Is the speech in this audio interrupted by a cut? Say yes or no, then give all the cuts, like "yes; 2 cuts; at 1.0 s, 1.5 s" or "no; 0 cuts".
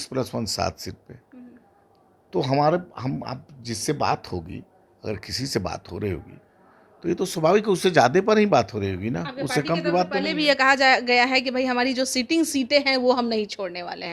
no; 0 cuts